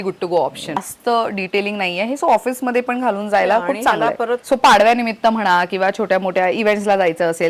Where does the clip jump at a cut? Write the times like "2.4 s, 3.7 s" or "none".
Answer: 0.9 s, 4.4 s

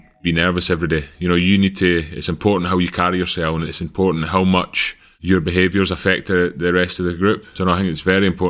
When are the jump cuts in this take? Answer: 7.5 s

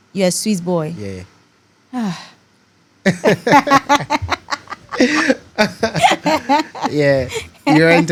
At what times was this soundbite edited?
none

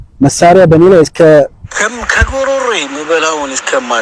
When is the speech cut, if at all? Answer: 1.6 s

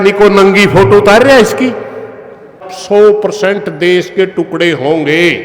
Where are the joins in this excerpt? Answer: 2.7 s

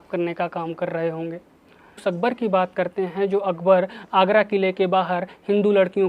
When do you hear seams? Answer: 1.9 s

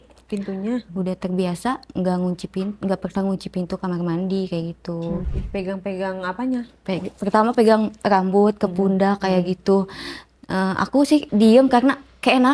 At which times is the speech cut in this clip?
0.9 s, 5.3 s, 11.3 s

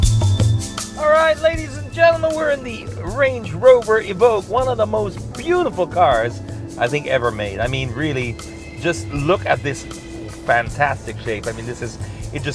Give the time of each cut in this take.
1.4 s

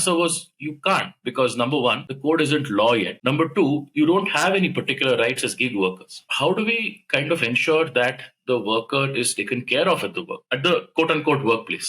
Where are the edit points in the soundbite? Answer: 2.1 s, 3.1 s, 6.2 s

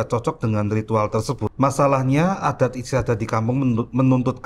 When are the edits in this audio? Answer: 1.5 s

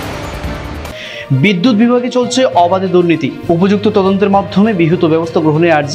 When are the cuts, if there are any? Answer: 0.9 s

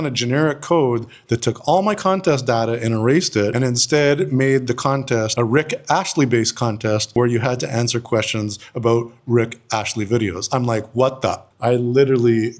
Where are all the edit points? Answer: 11.5 s

